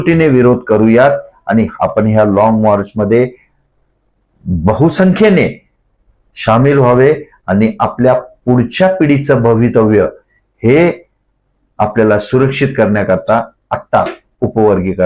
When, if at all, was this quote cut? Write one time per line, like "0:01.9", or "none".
0:01.7